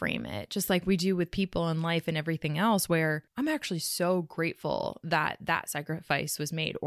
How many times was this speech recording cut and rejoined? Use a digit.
1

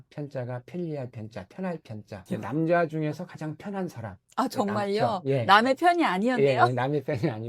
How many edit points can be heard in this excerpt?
0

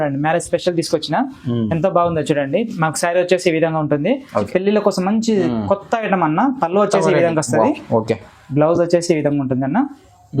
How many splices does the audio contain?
1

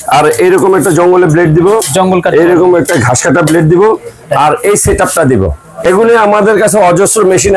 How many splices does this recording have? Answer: 1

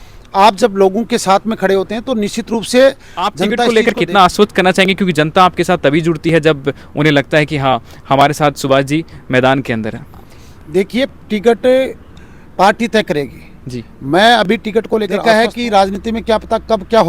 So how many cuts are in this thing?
2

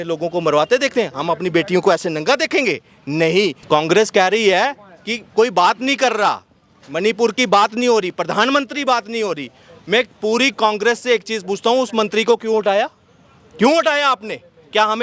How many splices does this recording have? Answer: 1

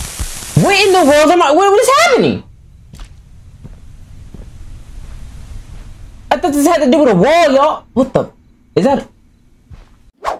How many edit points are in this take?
0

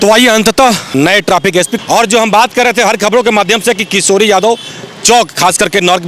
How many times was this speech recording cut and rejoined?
2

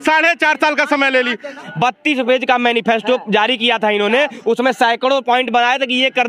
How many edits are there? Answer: 1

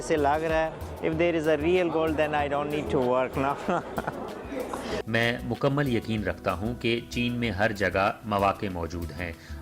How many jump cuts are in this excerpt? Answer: 1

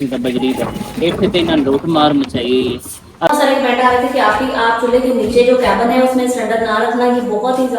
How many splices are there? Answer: 1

